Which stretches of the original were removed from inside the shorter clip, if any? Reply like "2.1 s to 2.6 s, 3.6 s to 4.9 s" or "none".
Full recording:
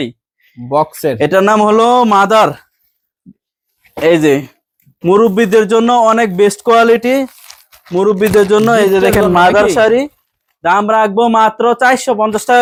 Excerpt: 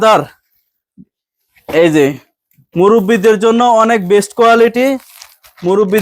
none